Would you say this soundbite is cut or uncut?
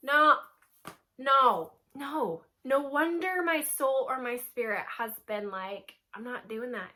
uncut